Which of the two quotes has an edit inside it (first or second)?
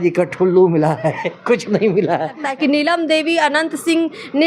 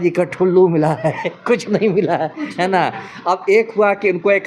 first